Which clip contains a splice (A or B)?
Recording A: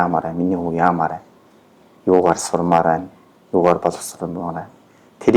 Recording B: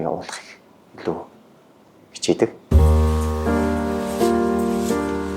B